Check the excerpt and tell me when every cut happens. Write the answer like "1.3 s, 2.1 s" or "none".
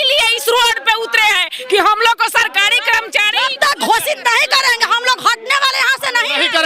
none